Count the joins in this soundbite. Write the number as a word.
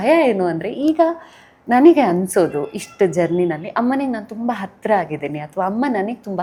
zero